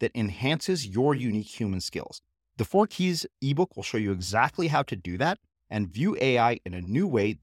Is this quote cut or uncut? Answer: uncut